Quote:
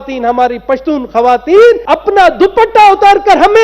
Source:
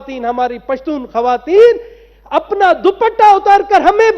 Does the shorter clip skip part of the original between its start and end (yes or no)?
yes